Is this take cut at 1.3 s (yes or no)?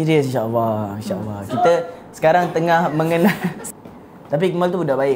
no